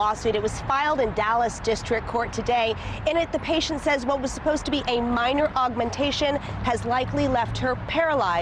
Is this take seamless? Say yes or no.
yes